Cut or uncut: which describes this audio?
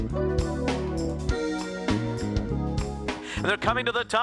cut